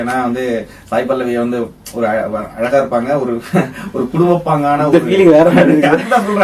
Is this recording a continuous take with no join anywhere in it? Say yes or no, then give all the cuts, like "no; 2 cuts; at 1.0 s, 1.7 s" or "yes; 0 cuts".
yes; 0 cuts